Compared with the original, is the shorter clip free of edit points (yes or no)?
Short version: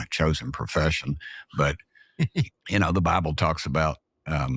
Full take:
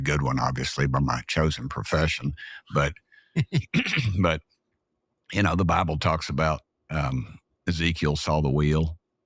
no